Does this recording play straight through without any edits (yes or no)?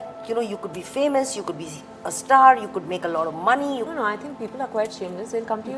no